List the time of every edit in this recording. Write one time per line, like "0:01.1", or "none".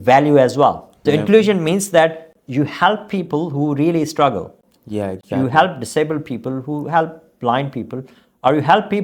0:01.0

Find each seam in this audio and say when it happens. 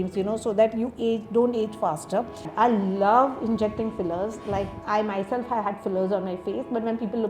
0:02.4

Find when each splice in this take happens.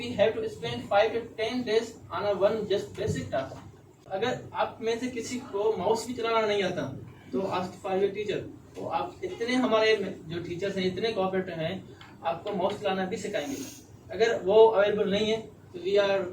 0:04.1

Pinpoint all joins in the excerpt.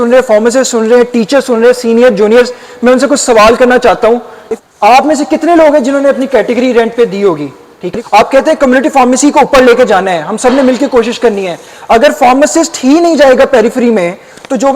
0:04.4
0:07.8

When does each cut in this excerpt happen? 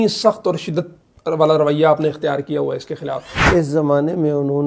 0:03.4

